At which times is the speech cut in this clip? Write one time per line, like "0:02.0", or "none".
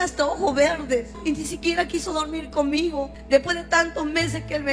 0:01.2